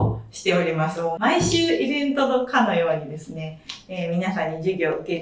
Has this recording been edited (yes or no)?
no